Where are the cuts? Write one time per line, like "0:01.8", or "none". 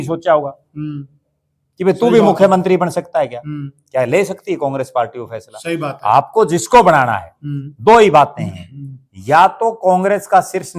none

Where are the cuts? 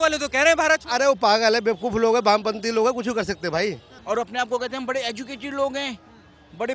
0:03.9

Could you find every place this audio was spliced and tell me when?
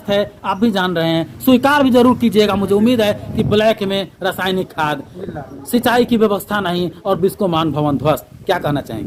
none

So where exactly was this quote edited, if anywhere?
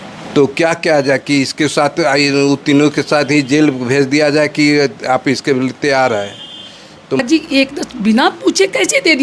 0:07.2

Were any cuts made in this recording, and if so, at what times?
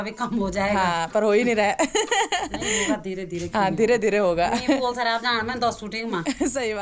none

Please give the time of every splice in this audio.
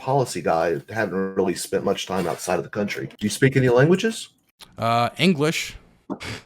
0:03.0

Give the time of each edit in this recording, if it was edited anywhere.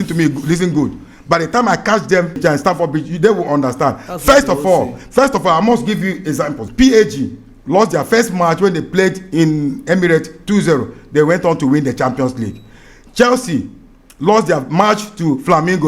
0:02.4
0:06.6

